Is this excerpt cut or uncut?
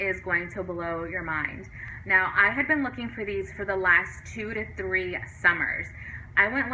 uncut